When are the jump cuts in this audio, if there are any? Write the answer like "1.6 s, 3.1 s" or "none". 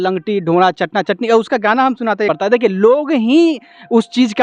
2.3 s